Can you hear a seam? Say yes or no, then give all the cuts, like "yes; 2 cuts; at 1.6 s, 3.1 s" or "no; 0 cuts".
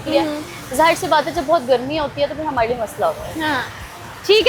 no; 0 cuts